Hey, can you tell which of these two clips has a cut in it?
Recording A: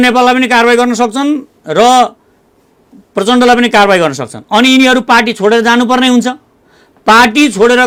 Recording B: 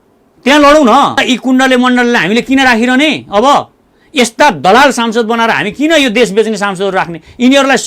B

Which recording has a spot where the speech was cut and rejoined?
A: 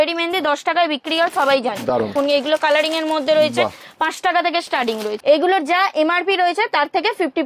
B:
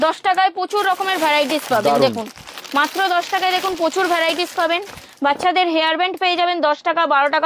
A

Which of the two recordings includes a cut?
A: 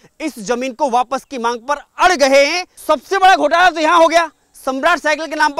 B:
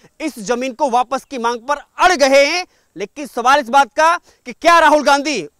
A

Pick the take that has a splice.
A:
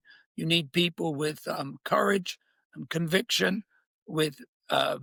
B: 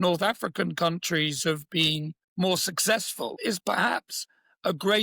B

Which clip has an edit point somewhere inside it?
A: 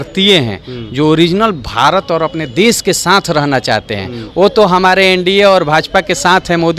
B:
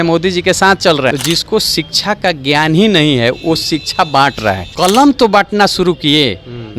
B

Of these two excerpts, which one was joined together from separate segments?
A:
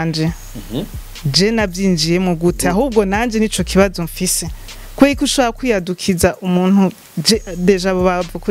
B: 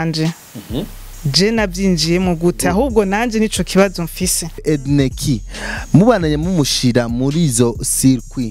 B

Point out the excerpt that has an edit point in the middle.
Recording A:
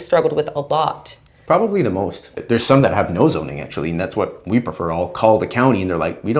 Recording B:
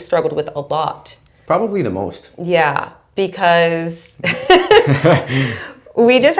A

